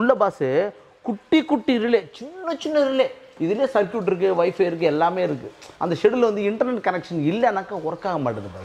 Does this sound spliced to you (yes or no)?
yes